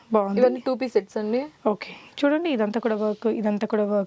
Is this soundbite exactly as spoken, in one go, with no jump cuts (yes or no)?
yes